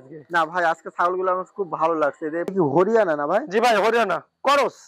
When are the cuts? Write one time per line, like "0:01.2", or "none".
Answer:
0:02.5